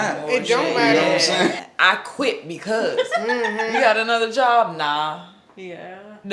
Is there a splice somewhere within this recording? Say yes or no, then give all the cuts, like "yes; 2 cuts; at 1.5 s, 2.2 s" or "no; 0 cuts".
yes; 1 cut; at 1.5 s